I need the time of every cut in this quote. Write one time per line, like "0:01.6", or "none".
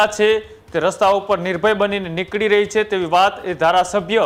none